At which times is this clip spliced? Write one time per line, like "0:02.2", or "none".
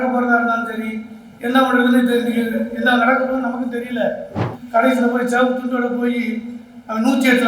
0:04.5